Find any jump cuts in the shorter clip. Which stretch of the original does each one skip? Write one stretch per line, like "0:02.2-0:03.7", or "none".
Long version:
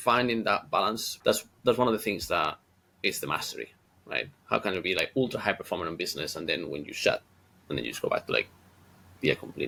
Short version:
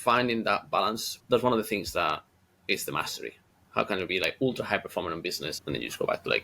0:01.1-0:01.5
0:03.9-0:04.4
0:06.2-0:07.5